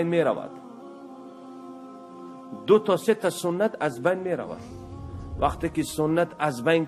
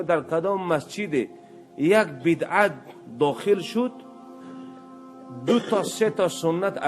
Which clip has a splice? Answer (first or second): second